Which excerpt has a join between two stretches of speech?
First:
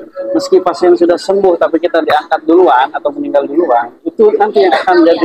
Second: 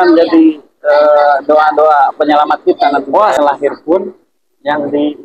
second; 1 cut; at 3.4 s

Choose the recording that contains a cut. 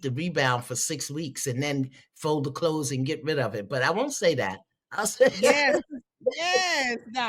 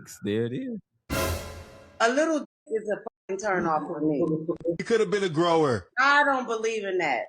second; 1 cut; at 1.4 s

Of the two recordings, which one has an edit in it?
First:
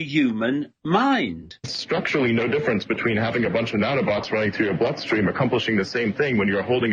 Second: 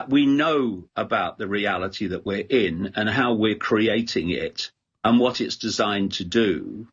first; 1 cut; at 1.8 s

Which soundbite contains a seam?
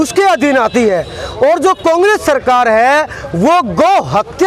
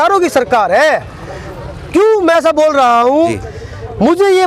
second; 1 cut; at 3.4 s

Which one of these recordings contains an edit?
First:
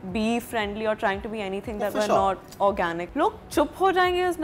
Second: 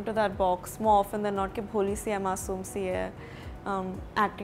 first; 1 cut; at 3.0 s

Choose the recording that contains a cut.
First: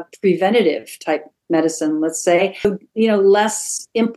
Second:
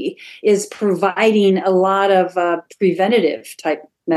first; 1 cut; at 2.7 s

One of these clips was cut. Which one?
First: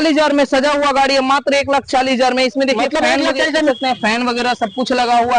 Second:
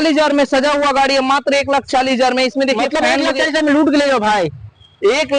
first; 1 cut; at 3.7 s

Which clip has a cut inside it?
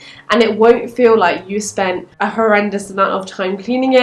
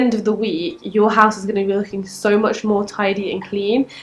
first; 1 cut; at 2.1 s

